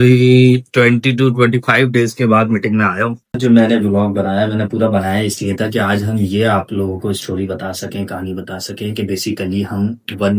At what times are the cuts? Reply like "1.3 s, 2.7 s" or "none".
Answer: 3.4 s